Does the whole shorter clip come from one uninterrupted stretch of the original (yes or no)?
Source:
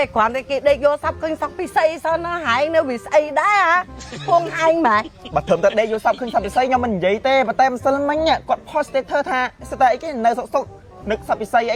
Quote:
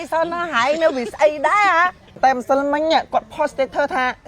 no